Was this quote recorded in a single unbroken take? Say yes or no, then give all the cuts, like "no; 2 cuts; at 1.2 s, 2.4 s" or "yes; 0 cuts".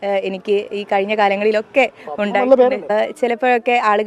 no; 1 cut; at 2.9 s